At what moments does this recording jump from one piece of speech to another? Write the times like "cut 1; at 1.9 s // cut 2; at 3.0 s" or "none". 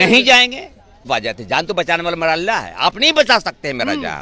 cut 1; at 1.1 s